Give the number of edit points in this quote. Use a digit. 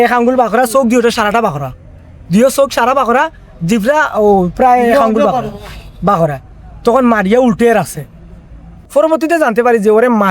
1